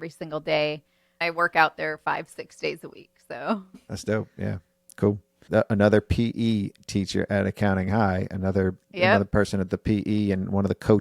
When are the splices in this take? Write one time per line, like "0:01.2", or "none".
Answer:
0:01.2
0:03.8
0:05.4

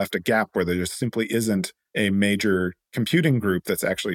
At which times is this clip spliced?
0:01.8
0:02.8

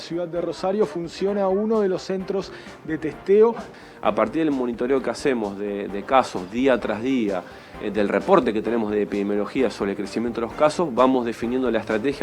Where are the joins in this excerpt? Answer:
0:03.7

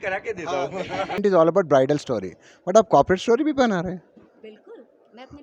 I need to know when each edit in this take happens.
0:01.2

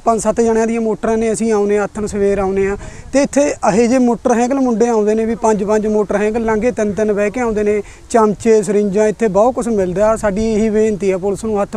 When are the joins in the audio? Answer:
none

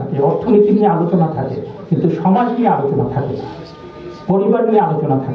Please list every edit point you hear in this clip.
none

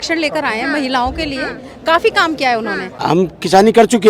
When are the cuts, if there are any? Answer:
0:03.0

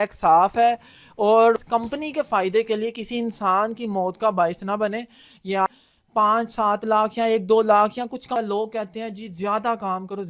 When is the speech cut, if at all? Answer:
0:01.6
0:05.7
0:08.4

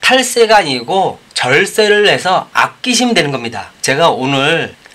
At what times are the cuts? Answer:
none

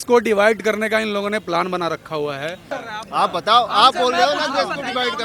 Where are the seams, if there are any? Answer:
0:02.8

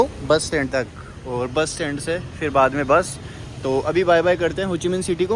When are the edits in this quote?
none

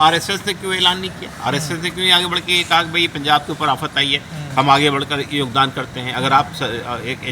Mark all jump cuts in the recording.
none

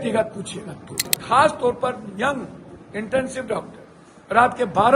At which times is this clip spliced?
0:01.1

